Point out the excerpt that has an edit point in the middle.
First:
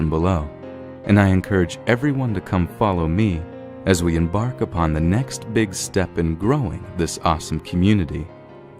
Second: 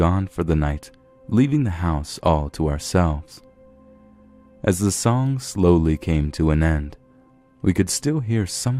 first; 1 cut; at 4.7 s

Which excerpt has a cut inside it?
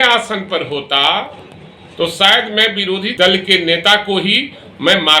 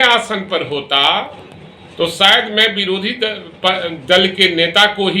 first; 1 cut; at 3.1 s

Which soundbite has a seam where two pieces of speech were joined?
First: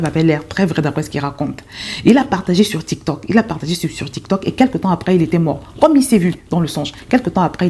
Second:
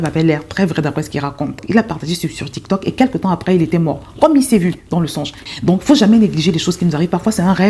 second; 2 cuts; at 1.6 s, 5.4 s

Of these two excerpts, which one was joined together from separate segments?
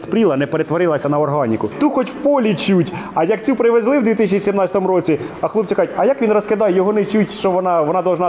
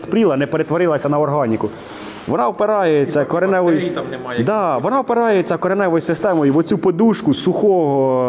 first; 1 cut; at 1.8 s

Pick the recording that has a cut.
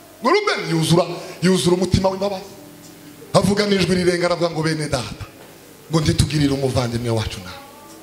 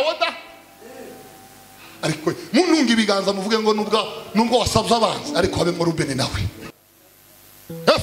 second; 1 cut; at 6.7 s

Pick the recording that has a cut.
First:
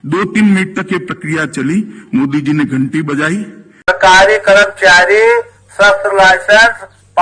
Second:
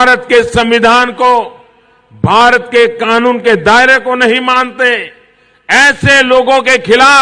first; 1 cut; at 3.6 s

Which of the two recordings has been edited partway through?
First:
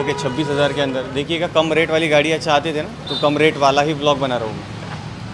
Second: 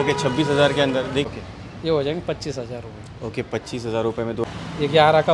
second; 2 cuts; at 1.3 s, 4.4 s

